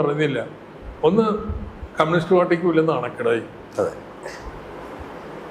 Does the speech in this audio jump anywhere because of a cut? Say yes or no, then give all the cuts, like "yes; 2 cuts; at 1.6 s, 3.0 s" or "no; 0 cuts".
no; 0 cuts